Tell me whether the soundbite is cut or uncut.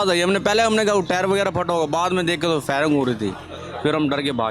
uncut